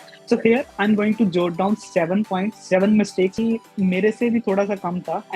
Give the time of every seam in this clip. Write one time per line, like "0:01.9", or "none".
0:03.3